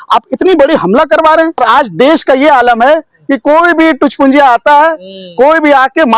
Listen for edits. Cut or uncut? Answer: cut